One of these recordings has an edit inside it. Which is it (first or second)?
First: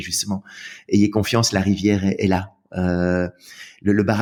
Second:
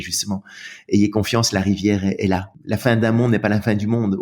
second